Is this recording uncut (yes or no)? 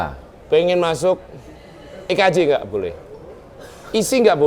yes